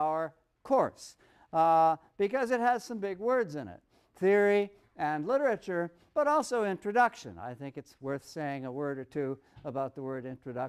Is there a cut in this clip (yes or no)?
no